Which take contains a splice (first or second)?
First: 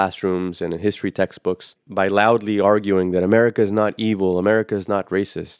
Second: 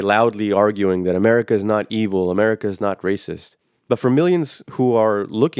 second